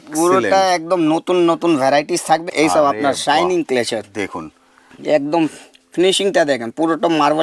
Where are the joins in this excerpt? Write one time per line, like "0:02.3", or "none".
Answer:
0:02.5